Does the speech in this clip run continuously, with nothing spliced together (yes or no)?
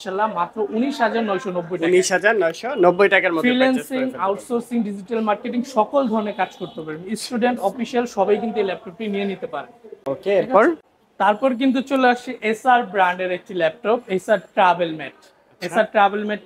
yes